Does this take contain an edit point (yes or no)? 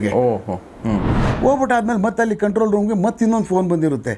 yes